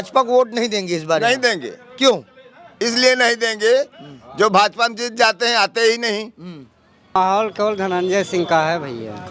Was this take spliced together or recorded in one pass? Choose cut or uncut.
cut